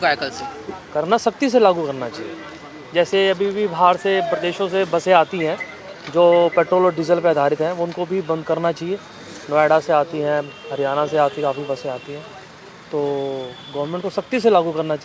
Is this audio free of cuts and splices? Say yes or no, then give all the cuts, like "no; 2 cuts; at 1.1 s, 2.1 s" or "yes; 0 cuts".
yes; 0 cuts